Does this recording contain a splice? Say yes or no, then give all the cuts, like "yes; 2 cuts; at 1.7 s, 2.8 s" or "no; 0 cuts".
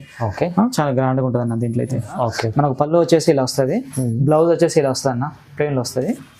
yes; 1 cut; at 2.1 s